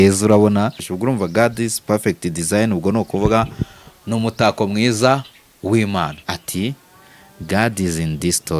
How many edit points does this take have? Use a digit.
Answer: 2